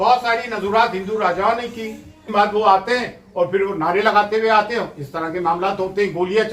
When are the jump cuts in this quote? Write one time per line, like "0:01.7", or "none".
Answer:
0:02.2